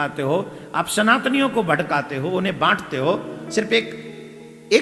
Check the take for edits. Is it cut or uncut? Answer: uncut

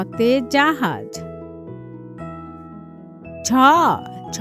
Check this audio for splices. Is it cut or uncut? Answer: uncut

